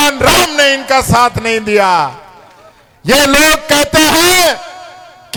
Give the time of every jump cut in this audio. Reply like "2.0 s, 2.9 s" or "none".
none